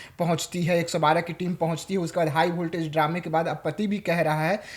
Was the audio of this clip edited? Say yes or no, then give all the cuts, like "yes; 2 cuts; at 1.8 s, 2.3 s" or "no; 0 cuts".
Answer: no; 0 cuts